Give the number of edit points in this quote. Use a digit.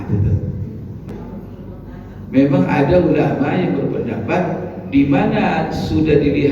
1